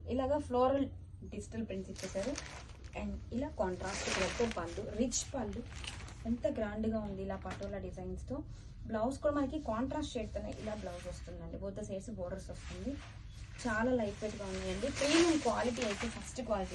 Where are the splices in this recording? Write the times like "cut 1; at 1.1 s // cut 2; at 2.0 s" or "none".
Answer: cut 1; at 10.5 s